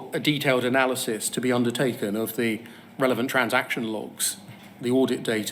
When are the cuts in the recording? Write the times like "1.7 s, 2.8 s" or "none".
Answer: none